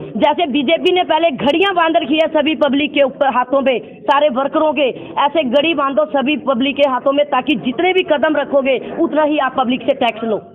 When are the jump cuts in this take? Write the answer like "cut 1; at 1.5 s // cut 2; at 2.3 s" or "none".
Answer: none